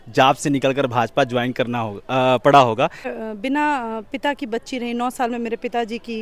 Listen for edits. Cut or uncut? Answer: cut